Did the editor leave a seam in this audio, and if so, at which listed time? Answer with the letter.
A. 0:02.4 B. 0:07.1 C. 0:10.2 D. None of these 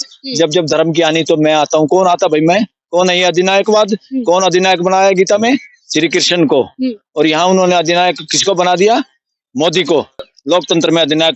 D